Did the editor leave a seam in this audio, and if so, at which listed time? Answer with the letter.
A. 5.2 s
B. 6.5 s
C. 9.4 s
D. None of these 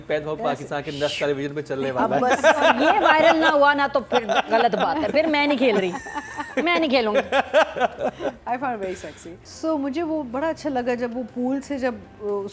C